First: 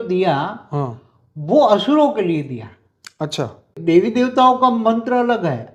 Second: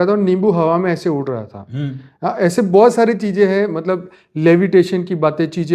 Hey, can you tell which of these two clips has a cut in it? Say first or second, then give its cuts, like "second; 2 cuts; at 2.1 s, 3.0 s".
first; 1 cut; at 3.8 s